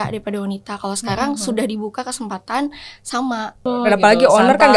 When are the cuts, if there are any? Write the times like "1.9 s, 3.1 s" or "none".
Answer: 3.6 s